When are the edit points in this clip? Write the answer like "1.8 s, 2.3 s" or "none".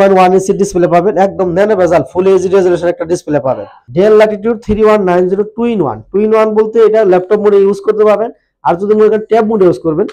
3.7 s